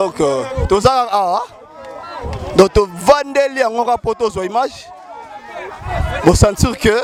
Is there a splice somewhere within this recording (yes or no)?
no